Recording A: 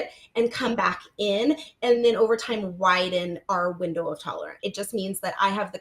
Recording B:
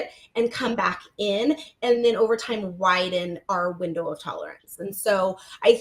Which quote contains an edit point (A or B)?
A